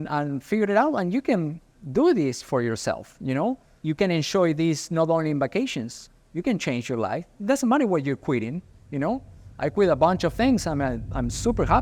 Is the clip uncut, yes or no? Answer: no